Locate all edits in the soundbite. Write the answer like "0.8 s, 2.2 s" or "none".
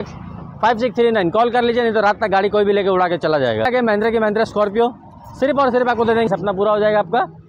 3.7 s, 6.3 s